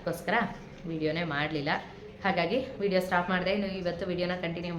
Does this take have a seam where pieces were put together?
no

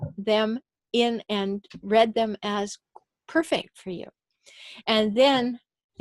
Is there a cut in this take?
no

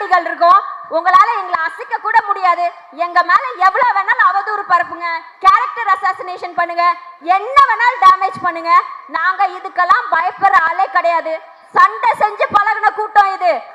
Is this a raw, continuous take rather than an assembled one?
yes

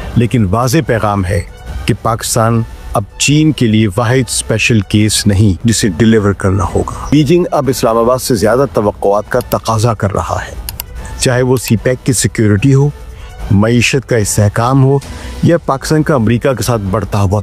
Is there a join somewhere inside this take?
yes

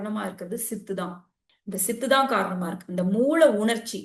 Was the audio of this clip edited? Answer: no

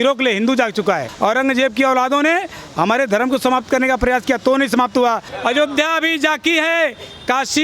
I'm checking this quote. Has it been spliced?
yes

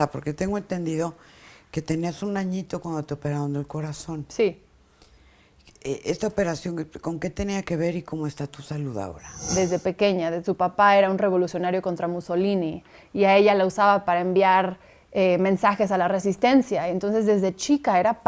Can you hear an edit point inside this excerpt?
yes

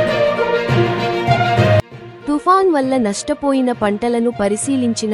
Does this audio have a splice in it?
no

